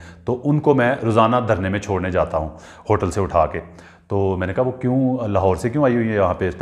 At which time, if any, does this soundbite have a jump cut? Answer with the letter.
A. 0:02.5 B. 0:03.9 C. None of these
C